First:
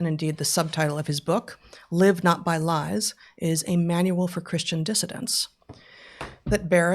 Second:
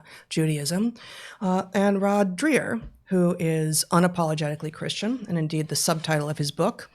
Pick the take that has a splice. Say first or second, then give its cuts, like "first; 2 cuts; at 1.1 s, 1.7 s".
second; 1 cut; at 3.8 s